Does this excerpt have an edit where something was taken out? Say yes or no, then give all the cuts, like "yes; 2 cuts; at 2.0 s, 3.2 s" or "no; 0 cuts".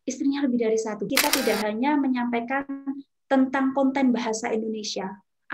yes; 1 cut; at 1.0 s